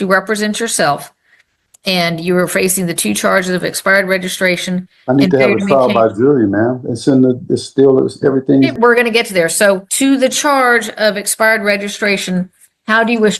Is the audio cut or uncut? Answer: cut